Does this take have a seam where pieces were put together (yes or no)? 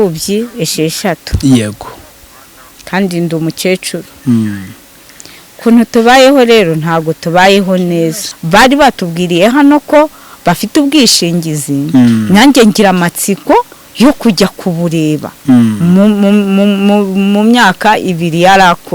yes